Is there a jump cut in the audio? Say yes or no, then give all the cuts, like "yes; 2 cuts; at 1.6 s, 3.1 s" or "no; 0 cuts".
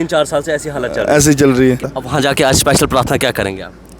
yes; 1 cut; at 1.9 s